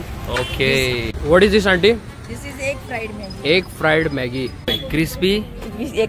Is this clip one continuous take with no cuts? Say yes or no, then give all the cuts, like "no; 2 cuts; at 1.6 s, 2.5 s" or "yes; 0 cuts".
no; 2 cuts; at 1.1 s, 4.7 s